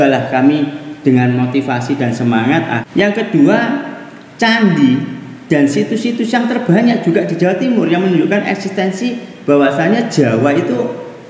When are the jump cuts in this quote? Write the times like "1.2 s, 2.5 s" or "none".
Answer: 2.8 s

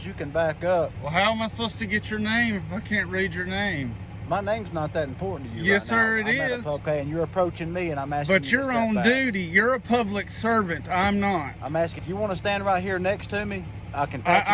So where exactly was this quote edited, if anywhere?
1.0 s, 6.8 s, 12.0 s

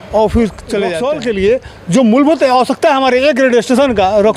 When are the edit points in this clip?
1.0 s

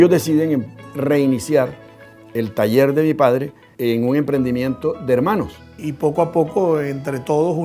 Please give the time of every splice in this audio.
0.9 s, 3.6 s, 5.8 s

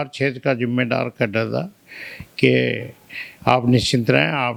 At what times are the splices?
none

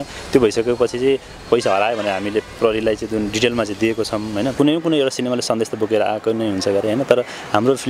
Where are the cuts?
4.5 s

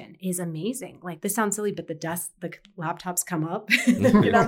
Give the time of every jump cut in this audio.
1.2 s

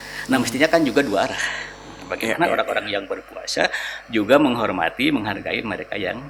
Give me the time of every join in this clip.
none

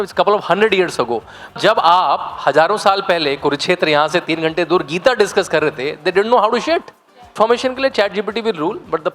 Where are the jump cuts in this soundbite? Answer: 1.6 s, 7.3 s

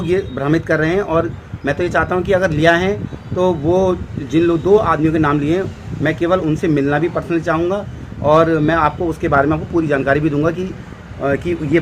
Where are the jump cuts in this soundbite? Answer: none

